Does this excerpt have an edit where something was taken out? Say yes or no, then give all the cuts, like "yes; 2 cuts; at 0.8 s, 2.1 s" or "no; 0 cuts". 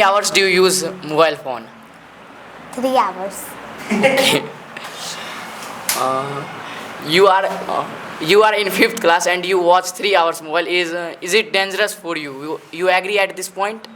no; 0 cuts